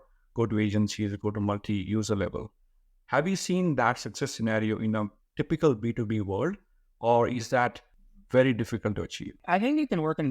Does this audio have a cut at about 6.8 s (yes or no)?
no